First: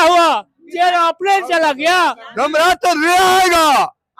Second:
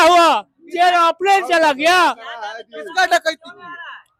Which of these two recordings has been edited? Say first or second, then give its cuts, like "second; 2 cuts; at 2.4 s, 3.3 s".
first; 1 cut; at 2.2 s